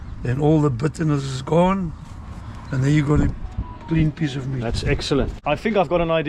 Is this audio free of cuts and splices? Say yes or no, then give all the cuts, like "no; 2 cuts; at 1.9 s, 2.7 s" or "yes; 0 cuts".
no; 1 cut; at 5.4 s